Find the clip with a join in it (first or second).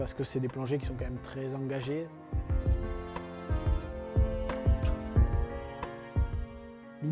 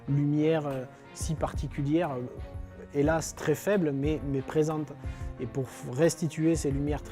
first